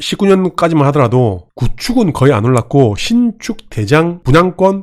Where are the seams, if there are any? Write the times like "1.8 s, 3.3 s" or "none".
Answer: none

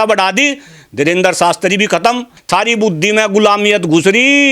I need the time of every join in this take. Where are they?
2.3 s

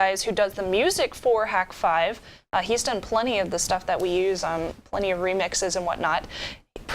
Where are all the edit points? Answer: 1.7 s

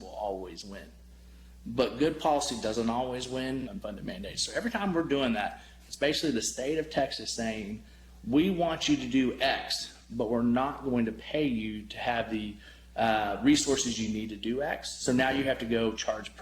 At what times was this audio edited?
3.7 s

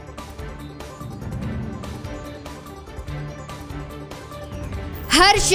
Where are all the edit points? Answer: none

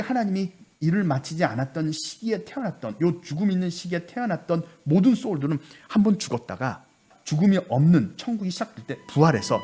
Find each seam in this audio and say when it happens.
7.1 s

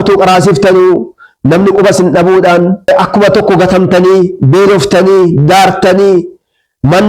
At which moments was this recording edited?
2.9 s

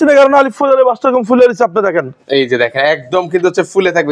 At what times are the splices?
none

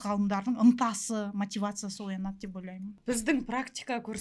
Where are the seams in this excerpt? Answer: 2.9 s

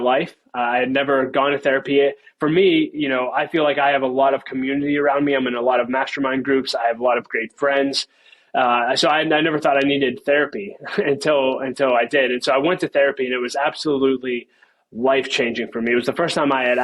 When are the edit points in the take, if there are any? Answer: none

